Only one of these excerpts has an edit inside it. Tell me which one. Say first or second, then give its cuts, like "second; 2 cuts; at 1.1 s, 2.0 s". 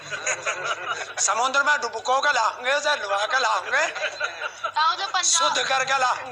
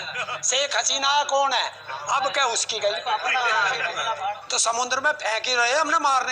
second; 1 cut; at 4.5 s